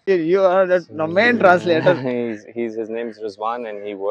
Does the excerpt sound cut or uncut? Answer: uncut